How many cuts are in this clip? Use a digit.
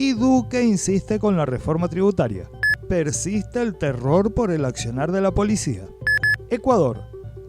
2